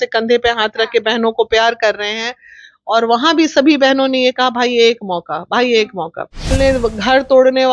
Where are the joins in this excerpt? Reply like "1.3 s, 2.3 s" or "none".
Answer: 6.5 s